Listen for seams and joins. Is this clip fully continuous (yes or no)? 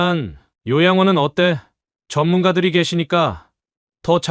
yes